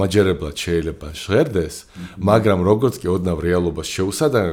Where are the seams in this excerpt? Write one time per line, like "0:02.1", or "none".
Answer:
none